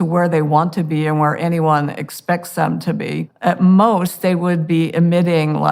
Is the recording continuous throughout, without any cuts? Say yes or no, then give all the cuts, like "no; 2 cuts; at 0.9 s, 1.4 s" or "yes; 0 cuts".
no; 1 cut; at 3.3 s